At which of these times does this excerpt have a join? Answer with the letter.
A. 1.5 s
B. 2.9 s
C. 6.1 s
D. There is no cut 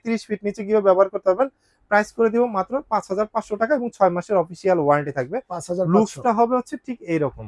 D